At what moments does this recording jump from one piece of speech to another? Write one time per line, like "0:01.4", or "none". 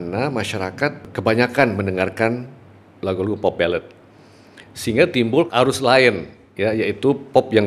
0:01.1
0:05.5